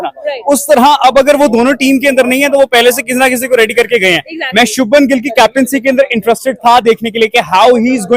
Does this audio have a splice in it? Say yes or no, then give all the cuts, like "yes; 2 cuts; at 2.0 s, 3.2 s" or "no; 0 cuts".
no; 0 cuts